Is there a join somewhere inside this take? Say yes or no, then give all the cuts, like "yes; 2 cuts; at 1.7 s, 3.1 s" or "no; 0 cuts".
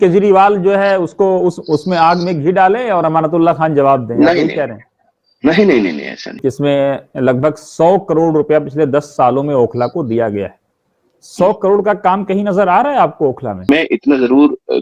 yes; 2 cuts; at 6.4 s, 13.7 s